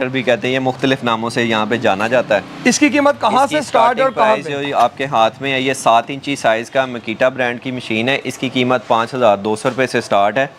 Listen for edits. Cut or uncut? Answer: uncut